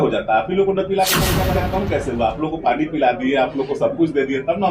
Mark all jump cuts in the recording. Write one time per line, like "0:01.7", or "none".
0:01.6